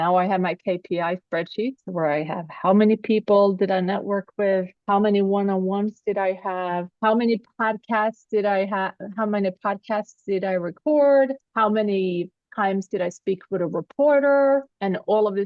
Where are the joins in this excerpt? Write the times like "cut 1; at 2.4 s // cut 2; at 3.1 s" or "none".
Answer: cut 1; at 12.4 s